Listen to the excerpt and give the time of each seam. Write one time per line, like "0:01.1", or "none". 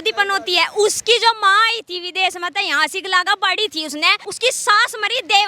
0:04.2